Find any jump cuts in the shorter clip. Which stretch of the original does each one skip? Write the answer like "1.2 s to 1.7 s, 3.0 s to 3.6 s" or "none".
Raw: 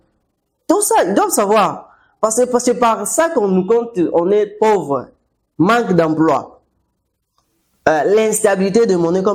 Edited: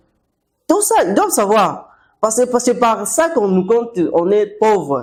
none